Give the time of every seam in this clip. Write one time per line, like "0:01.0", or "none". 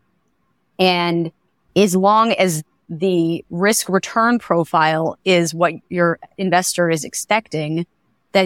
0:02.8
0:05.9